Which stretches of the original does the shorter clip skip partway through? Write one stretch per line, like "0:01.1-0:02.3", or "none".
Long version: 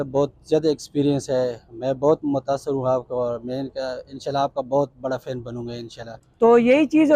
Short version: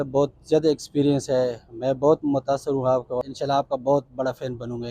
0:03.2-0:04.1

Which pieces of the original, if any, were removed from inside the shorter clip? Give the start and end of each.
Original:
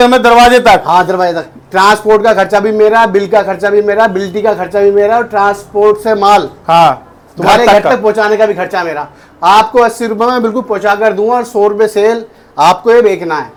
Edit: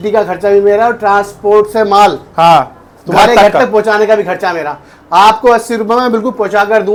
none

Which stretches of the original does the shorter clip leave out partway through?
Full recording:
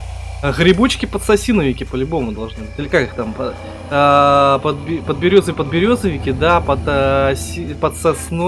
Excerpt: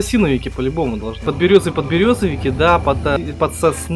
0:02.6-0:05.1
0:07.0-0:07.6

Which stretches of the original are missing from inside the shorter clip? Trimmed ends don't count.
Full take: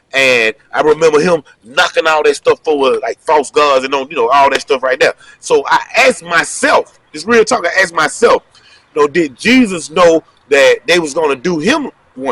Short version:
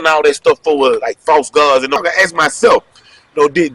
0:04.0-0:07.6

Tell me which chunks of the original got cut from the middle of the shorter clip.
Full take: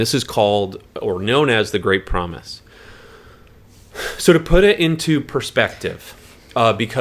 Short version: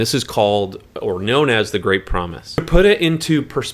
0:02.6-0:04.4

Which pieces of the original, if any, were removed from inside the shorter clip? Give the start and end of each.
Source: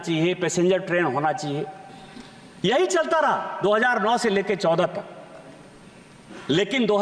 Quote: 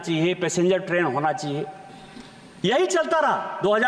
none

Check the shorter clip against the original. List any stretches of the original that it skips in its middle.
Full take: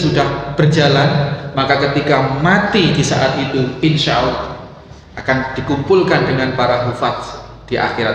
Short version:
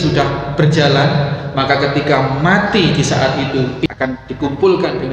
0:03.9-0:05.1

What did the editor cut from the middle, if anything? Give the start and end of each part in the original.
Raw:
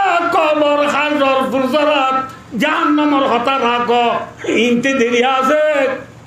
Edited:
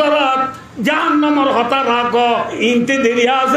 0:04.3-0:04.5

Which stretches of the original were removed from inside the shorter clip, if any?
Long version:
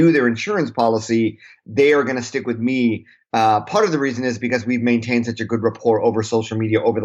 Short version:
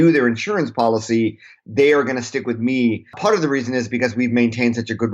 0:03.2-0:03.7

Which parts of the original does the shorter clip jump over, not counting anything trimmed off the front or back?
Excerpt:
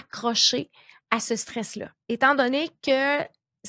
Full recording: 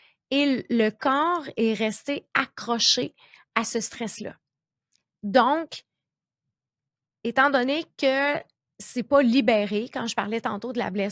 0:04.4-0:07.1

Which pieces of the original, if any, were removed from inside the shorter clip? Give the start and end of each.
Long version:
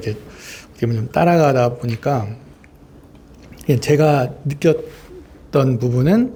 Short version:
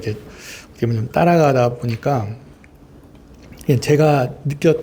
none

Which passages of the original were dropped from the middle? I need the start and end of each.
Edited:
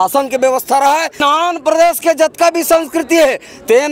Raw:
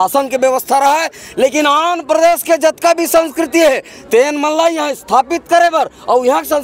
0:01.2-0:01.6

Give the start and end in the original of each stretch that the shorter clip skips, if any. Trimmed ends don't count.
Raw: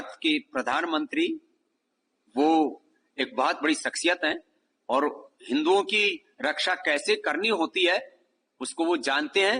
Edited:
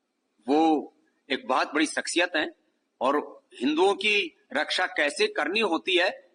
none

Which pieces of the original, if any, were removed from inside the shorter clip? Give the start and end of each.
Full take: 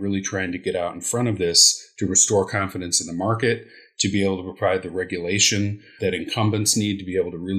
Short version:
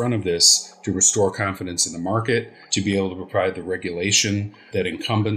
0:03.7-0:03.9

